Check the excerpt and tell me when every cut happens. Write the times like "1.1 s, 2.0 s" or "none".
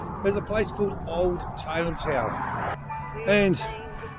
2.6 s